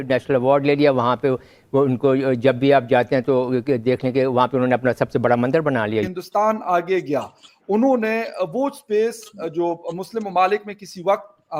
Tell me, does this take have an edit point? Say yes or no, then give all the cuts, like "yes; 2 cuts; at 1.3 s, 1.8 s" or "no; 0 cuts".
yes; 1 cut; at 6.2 s